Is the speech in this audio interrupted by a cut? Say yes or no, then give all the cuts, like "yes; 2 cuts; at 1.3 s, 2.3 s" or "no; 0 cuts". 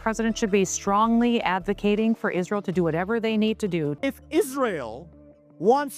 yes; 1 cut; at 4.0 s